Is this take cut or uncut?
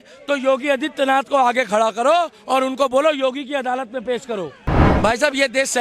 cut